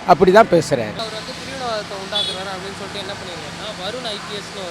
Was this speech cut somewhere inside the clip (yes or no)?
yes